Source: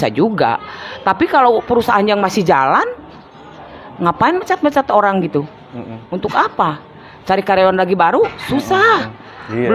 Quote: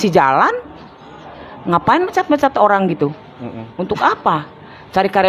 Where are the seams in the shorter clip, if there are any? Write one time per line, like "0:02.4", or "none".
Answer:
none